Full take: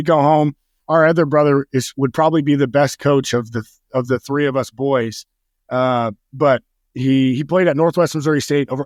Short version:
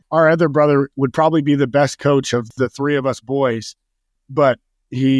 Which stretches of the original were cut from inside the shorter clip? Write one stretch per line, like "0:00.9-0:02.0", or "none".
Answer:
0:01.7-0:01.9
0:03.5-0:04.0
0:05.6-0:06.2